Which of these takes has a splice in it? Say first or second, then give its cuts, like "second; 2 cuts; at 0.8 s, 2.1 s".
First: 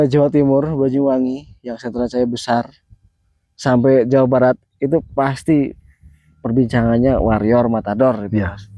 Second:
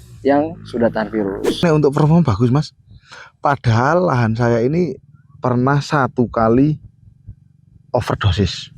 second; 1 cut; at 1.6 s